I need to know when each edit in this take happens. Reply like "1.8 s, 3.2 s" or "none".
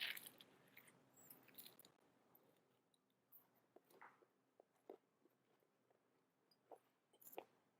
3.0 s